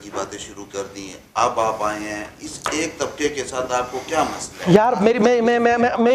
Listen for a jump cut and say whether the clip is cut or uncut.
uncut